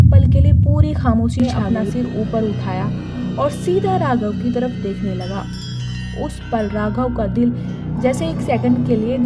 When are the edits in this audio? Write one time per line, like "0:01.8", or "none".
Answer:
0:01.3